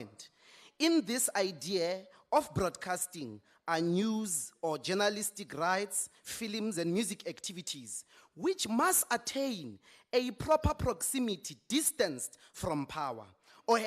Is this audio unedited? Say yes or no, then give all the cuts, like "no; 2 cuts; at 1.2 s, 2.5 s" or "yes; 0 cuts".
no; 1 cut; at 1.6 s